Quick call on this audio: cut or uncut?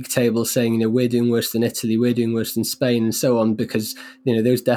uncut